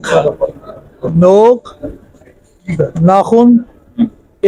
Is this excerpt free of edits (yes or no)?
yes